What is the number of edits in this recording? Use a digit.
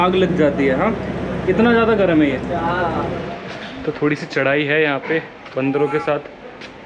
1